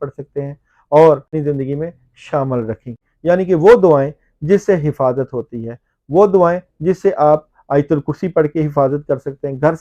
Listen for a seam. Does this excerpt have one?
yes; 1 cut; at 1.3 s

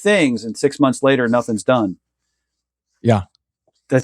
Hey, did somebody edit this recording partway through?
no; 0 cuts

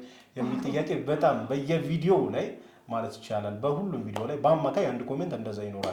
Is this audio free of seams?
yes; 0 cuts

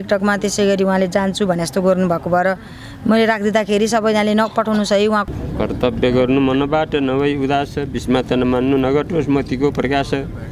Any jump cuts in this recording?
yes; 1 cut; at 5.3 s

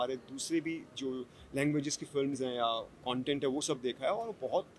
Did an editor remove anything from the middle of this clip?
no; 0 cuts

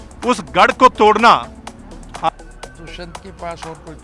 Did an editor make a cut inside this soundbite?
yes; 1 cut; at 2.3 s

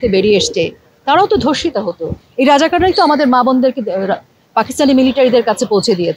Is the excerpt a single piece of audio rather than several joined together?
yes; 0 cuts

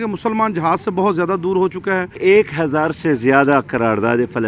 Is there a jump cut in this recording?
yes; 1 cut; at 2.2 s

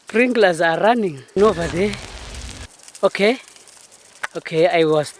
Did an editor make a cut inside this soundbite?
yes; 1 cut; at 1.4 s

